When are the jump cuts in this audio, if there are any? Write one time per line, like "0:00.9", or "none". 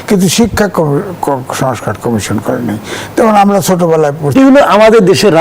0:04.3